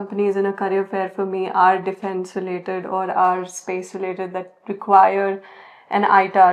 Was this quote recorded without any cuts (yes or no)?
yes